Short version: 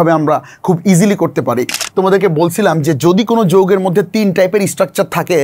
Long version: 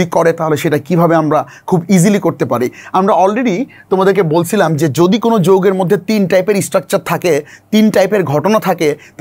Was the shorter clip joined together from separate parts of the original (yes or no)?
yes